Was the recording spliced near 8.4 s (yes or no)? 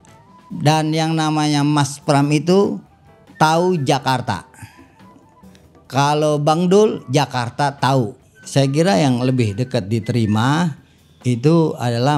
yes